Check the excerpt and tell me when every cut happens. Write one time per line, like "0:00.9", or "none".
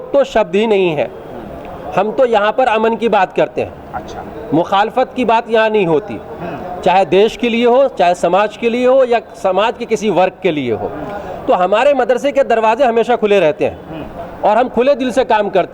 none